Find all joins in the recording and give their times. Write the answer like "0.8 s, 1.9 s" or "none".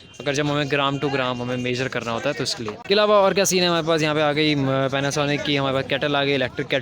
2.8 s